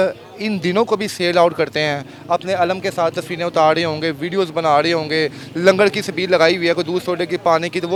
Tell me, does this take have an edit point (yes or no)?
no